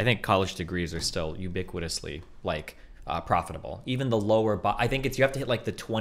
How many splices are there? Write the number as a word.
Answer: zero